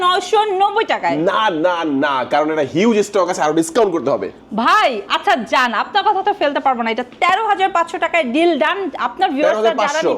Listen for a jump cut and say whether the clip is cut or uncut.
uncut